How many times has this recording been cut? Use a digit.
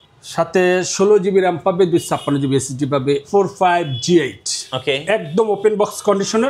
1